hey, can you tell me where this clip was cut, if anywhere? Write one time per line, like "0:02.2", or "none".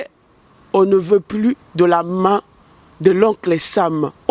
none